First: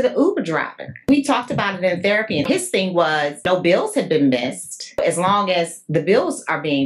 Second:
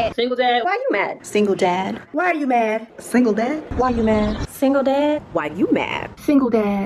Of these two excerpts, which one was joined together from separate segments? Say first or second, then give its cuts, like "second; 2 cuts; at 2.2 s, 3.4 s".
first; 4 cuts; at 1.1 s, 2.5 s, 3.4 s, 5.0 s